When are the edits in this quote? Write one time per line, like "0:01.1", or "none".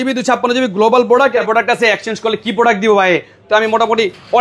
0:01.4